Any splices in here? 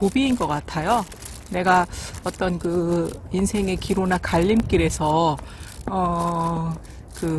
no; 0 cuts

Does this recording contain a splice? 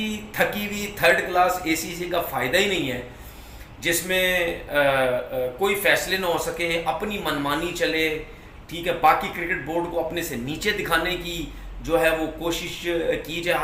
no; 0 cuts

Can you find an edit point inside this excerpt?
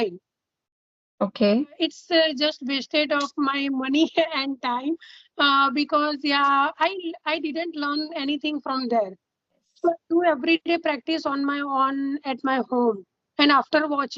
yes; 2 cuts; at 1.8 s, 9.7 s

